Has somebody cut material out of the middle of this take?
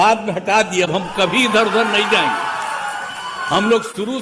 no; 0 cuts

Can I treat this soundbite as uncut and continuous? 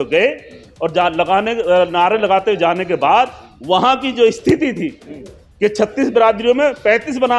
no; 1 cut; at 5.0 s

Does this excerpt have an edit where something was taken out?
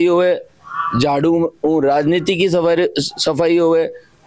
no; 0 cuts

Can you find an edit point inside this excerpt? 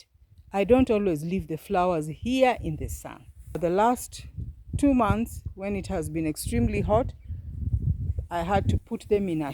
yes; 1 cut; at 3.6 s

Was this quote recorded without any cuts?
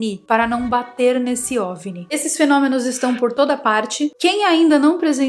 no; 1 cut; at 2.0 s

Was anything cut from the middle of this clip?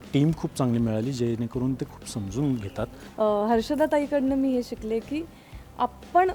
yes; 1 cut; at 3.0 s

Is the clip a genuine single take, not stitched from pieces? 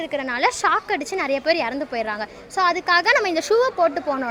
yes; 0 cuts

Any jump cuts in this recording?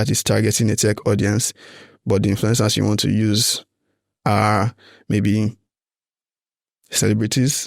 no; 0 cuts

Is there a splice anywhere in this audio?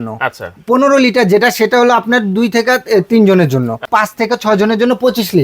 yes; 1 cut; at 3.8 s

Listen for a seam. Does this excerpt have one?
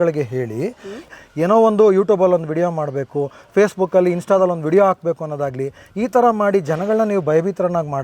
yes; 1 cut; at 1.1 s

